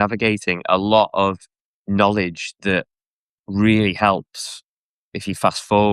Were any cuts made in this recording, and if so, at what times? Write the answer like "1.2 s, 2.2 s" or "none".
none